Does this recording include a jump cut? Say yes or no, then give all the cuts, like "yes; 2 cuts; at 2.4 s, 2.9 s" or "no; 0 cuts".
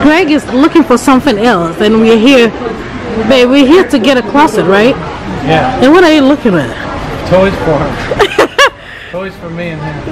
no; 0 cuts